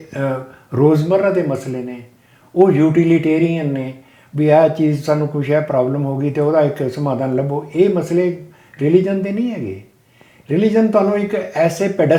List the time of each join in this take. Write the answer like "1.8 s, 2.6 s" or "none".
none